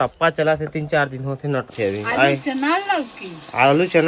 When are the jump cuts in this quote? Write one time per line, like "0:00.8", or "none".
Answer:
0:01.7